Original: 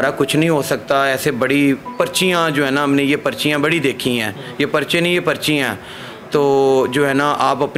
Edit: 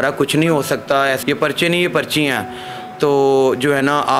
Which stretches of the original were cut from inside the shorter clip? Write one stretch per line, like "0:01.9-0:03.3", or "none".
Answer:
0:01.2-0:04.5